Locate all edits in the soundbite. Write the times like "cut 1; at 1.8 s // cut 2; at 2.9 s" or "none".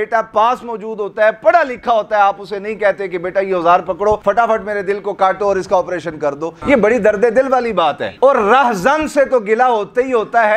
cut 1; at 4.2 s // cut 2; at 6.5 s